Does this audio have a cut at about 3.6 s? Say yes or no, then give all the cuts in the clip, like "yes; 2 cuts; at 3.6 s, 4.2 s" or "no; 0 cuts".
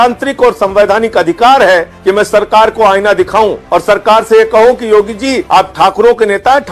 yes; 3 cuts; at 1.9 s, 3.6 s, 5.4 s